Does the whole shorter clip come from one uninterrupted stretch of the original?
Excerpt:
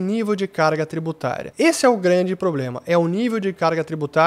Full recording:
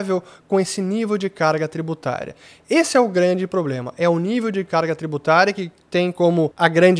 no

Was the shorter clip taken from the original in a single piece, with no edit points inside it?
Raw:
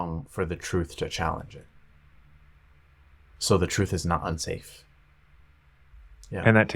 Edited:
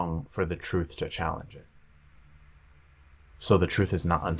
yes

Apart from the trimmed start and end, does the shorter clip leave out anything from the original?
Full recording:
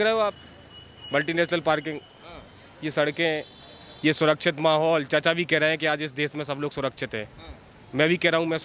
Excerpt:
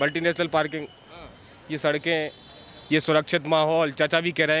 no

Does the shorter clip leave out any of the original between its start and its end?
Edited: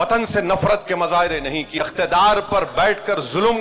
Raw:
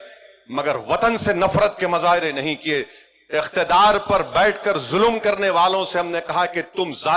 yes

